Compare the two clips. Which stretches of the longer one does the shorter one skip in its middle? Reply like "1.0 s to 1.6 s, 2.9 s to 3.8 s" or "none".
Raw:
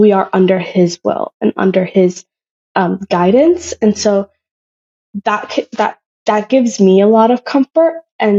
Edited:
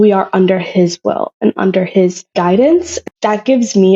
2.2 s to 3.0 s, 3.7 s to 6.0 s